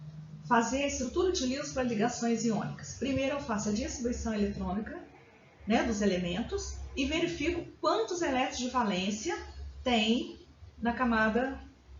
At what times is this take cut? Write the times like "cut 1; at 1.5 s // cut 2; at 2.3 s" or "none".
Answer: cut 1; at 2.2 s